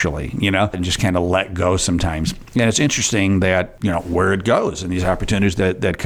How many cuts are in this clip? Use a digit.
1